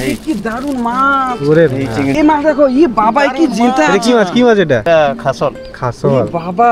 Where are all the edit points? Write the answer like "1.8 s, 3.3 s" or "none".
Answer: 2.1 s, 4.8 s